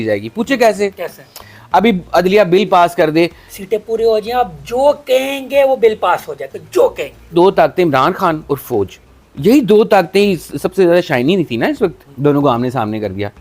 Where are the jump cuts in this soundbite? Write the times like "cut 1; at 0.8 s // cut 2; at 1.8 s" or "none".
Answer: cut 1; at 3.5 s // cut 2; at 7.3 s